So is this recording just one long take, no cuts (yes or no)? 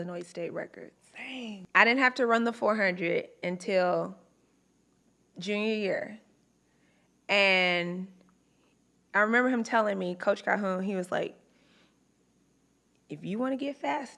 no